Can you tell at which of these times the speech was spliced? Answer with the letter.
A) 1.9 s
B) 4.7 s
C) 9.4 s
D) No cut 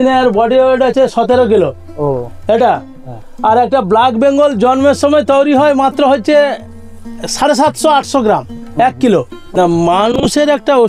C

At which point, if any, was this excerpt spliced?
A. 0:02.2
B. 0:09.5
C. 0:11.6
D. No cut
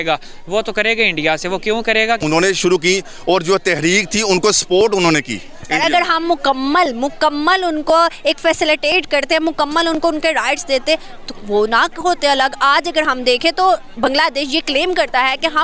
A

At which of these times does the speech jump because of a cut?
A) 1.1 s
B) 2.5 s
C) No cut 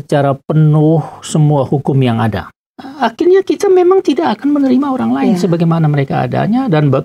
B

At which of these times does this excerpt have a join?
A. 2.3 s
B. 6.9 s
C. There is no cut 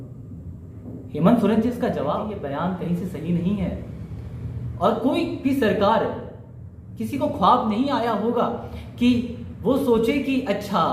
A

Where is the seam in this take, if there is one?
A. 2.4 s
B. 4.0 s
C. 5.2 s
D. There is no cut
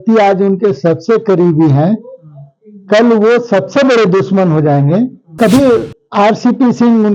C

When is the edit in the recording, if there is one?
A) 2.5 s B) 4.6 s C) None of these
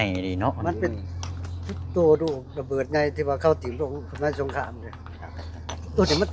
C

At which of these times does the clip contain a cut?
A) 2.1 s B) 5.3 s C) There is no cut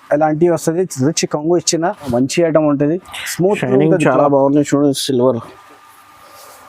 A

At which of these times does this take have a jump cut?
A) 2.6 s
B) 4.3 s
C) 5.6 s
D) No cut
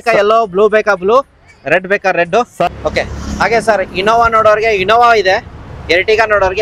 A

